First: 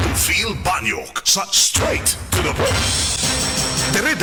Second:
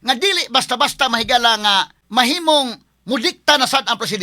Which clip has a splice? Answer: second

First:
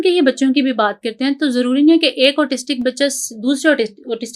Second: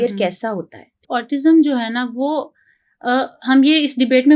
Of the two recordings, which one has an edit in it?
second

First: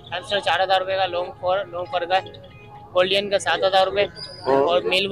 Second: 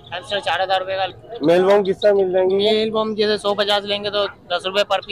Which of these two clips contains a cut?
second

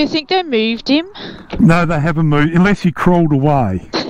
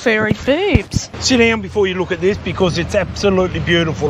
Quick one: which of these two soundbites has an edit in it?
second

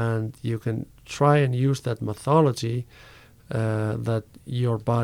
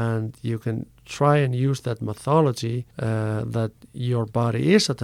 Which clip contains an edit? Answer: second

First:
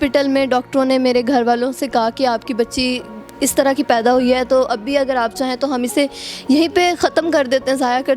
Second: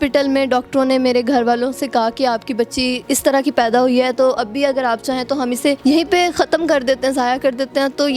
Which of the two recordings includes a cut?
second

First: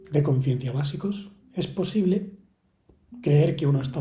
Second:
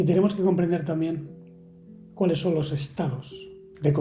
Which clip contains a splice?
first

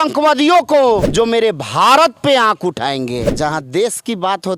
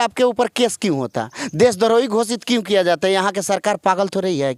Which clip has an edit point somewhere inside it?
first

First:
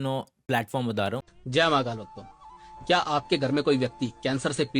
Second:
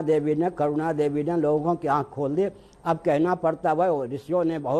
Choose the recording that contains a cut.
first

